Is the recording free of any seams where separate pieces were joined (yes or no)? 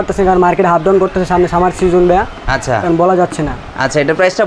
yes